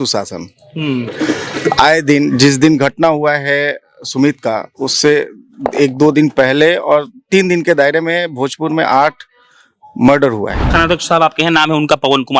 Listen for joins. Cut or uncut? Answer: cut